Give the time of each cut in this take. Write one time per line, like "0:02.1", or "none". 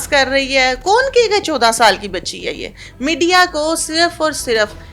none